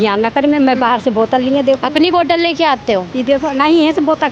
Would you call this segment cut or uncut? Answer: uncut